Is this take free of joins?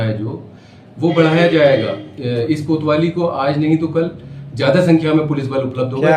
yes; 0 cuts

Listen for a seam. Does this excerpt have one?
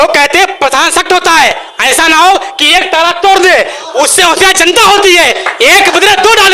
no; 0 cuts

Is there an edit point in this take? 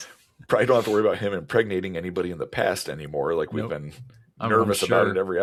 no; 0 cuts

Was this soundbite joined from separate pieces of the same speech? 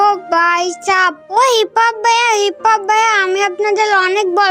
yes; 1 cut; at 1.2 s

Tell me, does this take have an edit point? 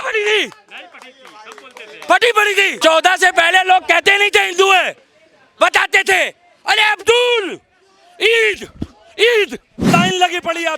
yes; 2 cuts; at 2.7 s, 9.9 s

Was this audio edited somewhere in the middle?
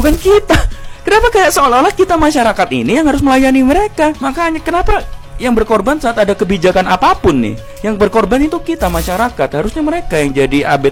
no; 0 cuts

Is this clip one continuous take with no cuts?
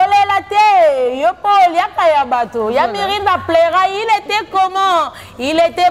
yes; 0 cuts

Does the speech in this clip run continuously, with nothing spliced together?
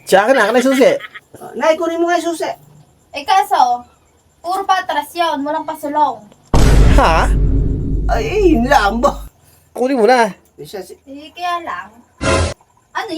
no; 1 cut; at 9.8 s

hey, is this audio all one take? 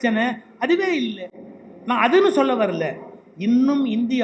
yes; 0 cuts

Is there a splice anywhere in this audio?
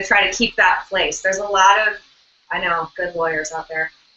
no; 0 cuts

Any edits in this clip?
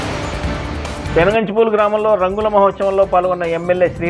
no; 0 cuts

